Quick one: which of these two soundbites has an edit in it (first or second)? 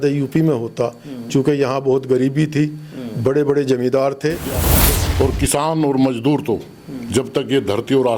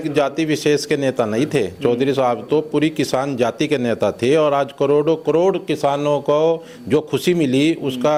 first